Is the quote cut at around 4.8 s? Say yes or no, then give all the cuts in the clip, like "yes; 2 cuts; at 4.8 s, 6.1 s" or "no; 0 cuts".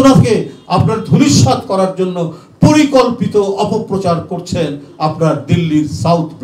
no; 0 cuts